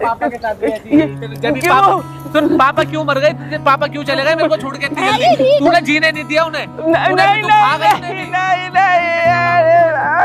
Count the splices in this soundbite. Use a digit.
0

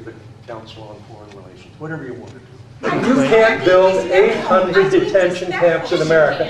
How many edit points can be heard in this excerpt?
1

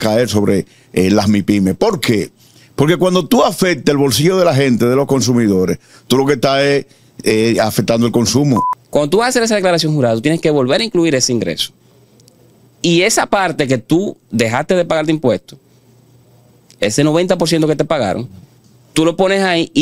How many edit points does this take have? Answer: 1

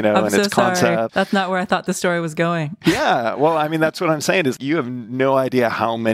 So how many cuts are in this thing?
3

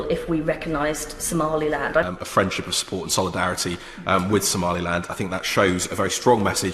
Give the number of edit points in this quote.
1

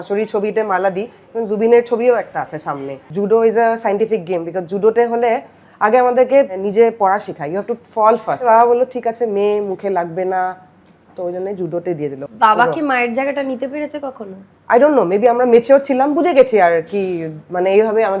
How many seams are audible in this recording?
4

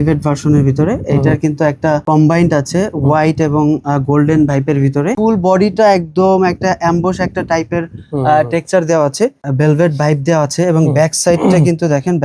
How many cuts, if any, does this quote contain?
3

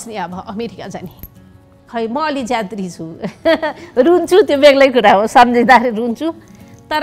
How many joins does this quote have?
1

